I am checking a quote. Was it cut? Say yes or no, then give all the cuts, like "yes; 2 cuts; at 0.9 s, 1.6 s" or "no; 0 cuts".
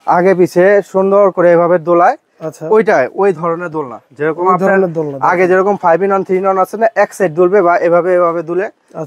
no; 0 cuts